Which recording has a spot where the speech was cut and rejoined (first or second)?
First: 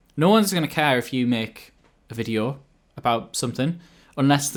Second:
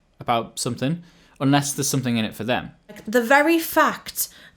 second